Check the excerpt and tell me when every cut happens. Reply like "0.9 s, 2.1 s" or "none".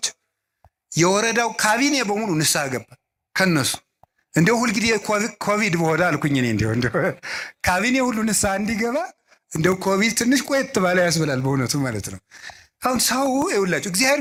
none